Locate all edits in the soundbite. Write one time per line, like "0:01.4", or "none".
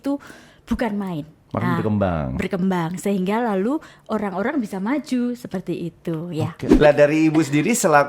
0:06.6